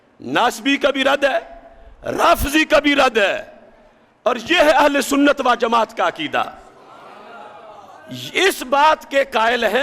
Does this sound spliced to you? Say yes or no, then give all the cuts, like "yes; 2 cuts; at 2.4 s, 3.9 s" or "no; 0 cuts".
no; 0 cuts